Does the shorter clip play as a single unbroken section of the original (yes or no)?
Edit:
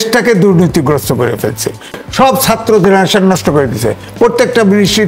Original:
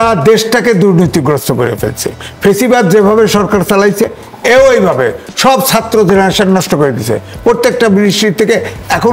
no